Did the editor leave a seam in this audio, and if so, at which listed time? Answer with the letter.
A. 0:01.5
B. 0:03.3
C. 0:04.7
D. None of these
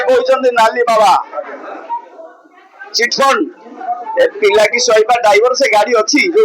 A